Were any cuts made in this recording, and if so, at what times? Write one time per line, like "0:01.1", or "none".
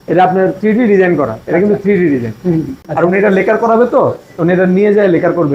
0:02.8

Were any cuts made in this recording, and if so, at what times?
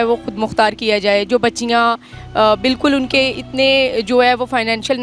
none

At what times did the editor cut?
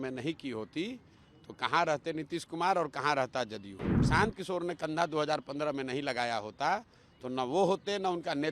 0:04.0

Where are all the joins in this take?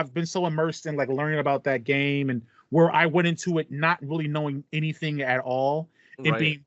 0:02.5

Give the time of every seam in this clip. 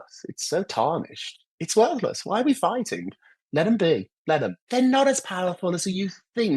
0:04.4

